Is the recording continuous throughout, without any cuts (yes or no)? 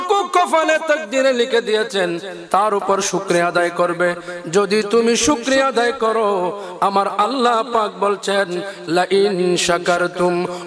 yes